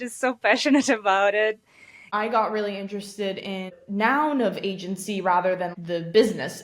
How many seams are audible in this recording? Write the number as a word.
three